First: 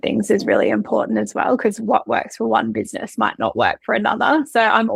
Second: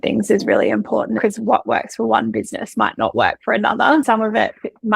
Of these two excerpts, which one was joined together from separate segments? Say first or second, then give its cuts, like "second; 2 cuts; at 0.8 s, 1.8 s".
second; 2 cuts; at 1.2 s, 4.0 s